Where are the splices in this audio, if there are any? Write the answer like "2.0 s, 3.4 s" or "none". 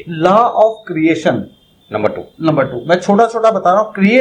none